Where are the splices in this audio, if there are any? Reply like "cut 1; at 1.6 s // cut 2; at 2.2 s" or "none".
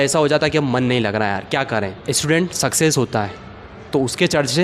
cut 1; at 2.0 s